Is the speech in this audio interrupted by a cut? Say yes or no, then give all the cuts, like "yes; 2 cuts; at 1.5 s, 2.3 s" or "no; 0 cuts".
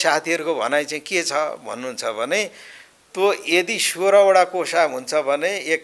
no; 0 cuts